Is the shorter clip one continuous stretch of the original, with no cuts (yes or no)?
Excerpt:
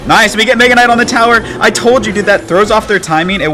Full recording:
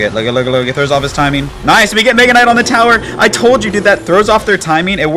yes